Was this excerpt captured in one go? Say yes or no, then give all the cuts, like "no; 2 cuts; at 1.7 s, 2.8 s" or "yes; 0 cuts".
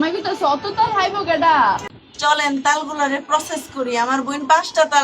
no; 1 cut; at 1.9 s